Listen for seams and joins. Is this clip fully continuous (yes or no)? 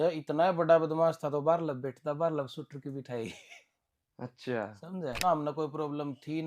no